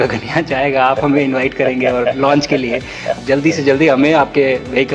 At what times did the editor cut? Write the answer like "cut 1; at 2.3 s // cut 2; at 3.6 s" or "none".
cut 1; at 3.2 s